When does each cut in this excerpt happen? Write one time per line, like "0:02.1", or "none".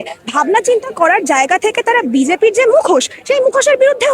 none

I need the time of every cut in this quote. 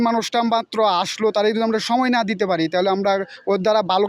none

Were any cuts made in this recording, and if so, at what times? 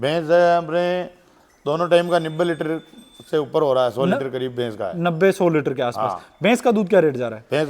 none

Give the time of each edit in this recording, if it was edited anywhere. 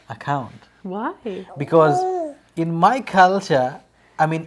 none

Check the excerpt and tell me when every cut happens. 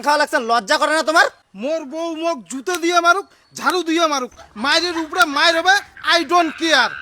none

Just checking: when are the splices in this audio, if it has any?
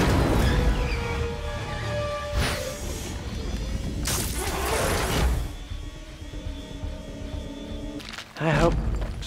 0:08.0

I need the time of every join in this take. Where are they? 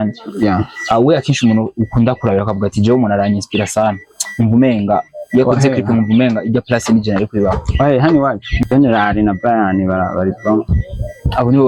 0:08.5

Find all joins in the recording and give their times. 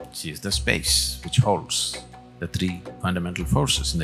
0:02.9

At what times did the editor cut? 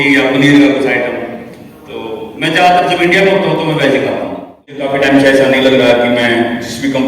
0:04.8

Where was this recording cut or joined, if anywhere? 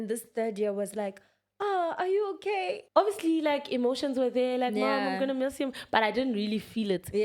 0:02.8

